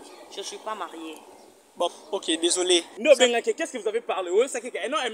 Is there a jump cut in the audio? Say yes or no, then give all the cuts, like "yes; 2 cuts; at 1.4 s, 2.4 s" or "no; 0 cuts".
yes; 1 cut; at 2.9 s